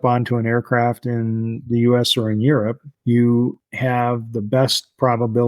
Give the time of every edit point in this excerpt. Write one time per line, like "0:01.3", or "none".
0:02.9
0:03.7

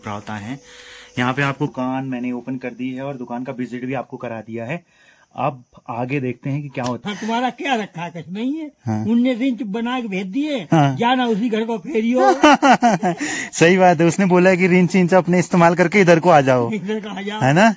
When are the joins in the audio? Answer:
0:01.7
0:07.0

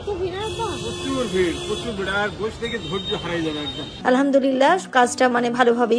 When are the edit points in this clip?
0:04.0

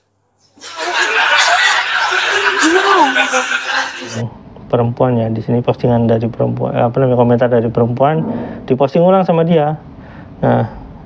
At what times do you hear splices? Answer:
0:04.1

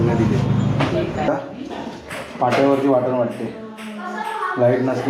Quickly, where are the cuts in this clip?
0:01.3

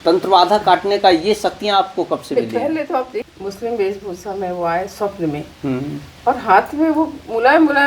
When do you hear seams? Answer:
0:03.3

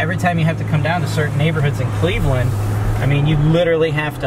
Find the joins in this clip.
none

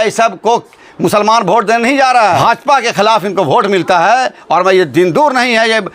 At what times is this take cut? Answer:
0:02.4

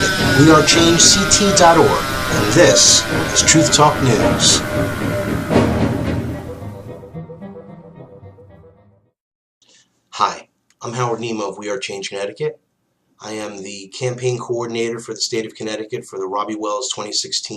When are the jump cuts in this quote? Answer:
0:12.5

